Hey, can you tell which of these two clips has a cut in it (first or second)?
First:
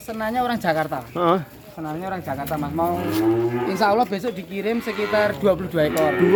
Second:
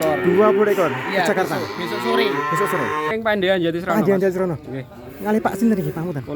second